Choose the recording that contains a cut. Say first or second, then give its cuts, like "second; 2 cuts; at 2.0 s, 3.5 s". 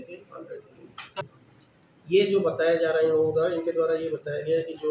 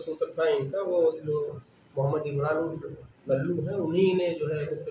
first; 1 cut; at 1.2 s